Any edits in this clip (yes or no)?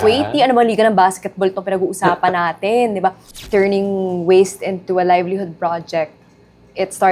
yes